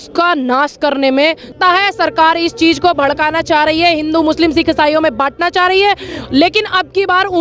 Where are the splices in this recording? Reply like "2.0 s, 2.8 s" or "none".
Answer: 1.6 s